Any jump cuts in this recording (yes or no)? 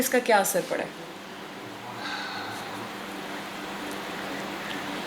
no